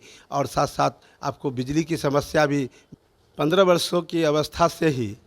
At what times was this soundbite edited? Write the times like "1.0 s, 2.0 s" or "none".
2.8 s